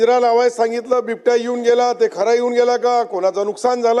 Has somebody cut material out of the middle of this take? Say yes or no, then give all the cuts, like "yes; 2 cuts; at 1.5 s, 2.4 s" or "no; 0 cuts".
no; 0 cuts